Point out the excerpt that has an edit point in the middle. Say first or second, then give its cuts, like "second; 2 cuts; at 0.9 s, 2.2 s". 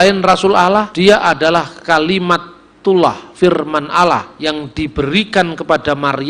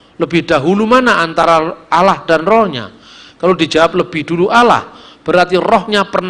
first; 2 cuts; at 0.9 s, 4.3 s